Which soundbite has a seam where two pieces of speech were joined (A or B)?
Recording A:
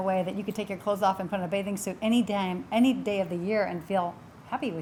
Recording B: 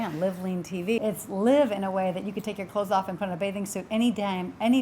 B